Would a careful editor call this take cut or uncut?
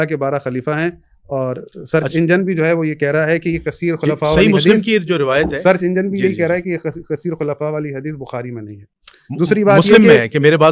uncut